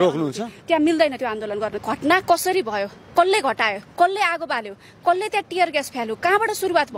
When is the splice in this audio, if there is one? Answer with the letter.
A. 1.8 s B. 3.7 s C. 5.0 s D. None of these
A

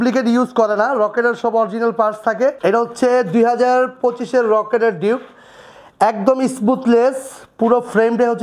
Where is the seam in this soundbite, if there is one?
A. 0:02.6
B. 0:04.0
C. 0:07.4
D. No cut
A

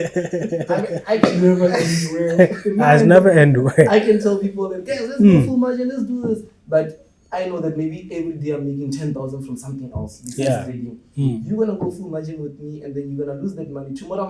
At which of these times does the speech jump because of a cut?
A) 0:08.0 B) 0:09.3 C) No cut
C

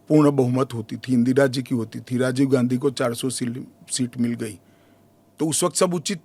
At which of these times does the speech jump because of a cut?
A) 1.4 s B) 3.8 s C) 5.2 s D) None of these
D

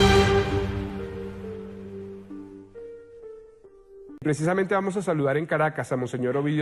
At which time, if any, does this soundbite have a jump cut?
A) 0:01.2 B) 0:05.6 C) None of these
C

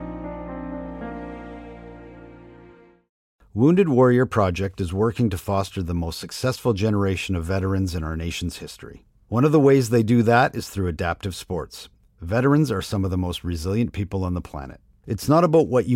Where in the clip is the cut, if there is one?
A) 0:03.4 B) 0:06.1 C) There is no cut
A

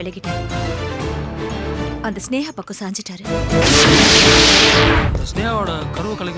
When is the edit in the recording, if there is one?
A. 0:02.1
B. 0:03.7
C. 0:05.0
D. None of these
C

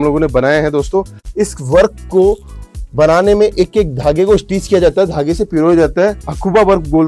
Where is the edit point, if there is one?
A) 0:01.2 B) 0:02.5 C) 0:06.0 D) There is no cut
A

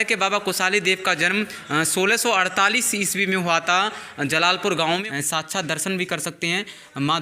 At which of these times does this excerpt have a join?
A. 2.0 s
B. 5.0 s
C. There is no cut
B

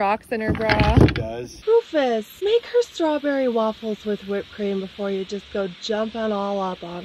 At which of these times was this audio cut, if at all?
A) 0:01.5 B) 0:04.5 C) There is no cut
A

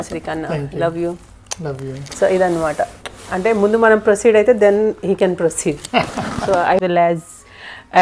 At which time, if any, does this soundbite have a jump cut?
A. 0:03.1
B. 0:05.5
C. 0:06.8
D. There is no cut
C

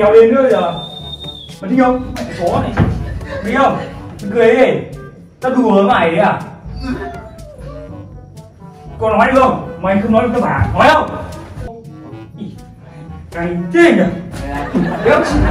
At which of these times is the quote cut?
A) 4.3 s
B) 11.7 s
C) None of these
B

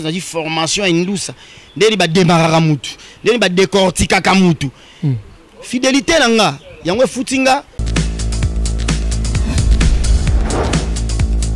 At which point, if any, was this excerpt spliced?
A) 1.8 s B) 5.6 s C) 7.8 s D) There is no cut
C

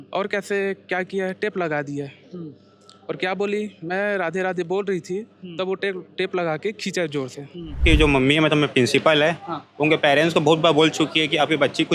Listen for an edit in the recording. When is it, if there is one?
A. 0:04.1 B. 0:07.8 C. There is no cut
B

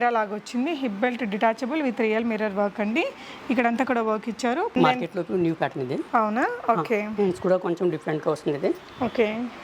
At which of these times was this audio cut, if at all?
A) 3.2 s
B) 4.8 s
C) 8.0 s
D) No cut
B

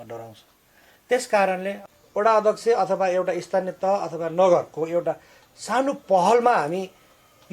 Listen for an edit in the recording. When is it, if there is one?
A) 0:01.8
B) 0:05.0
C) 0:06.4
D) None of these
A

